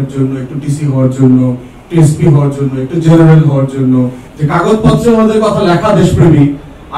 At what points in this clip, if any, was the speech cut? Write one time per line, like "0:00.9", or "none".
0:04.2

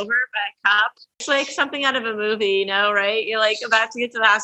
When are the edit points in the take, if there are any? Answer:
0:01.2

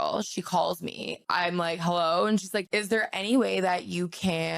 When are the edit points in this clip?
0:01.2
0:02.7

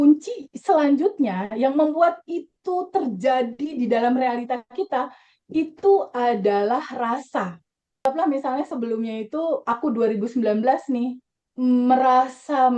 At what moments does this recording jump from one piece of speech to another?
0:08.0

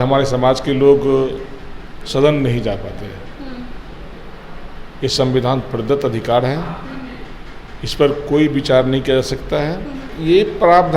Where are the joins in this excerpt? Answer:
0:10.1

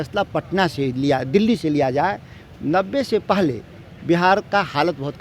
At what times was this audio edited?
none

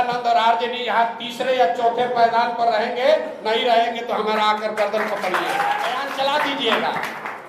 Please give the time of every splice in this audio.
0:06.0

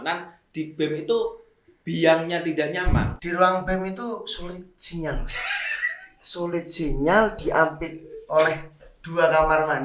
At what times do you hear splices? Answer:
0:03.1

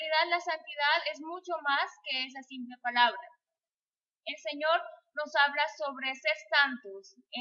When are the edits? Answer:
0:02.8

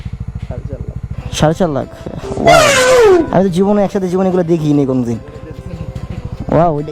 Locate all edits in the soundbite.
none

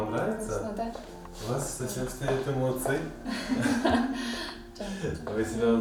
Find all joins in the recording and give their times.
none

